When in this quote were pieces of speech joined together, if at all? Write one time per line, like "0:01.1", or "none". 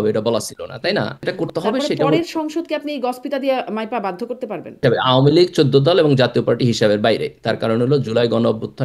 0:01.3
0:04.8